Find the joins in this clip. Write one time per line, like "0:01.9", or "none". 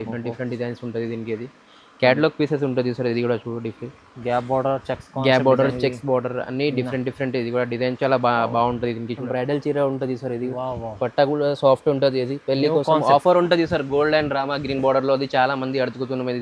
0:09.2